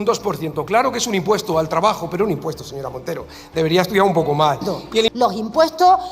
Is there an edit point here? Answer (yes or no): yes